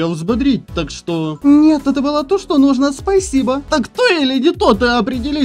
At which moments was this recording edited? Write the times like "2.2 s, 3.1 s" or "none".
1.3 s, 3.6 s